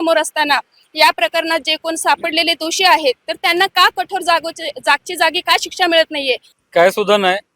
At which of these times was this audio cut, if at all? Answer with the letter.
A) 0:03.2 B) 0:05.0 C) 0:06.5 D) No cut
C